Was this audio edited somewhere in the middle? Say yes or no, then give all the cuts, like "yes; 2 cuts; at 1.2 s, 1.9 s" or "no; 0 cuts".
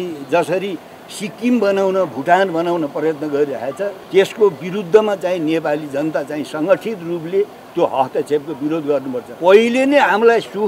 yes; 2 cuts; at 4.0 s, 9.3 s